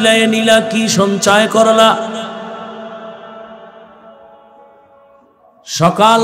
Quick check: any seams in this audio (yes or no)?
no